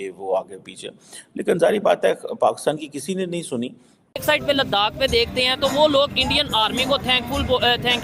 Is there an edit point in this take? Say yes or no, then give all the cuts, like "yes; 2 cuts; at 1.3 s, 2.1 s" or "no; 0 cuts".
yes; 1 cut; at 4.2 s